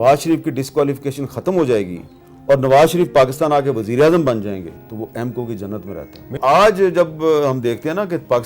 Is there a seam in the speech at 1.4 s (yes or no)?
no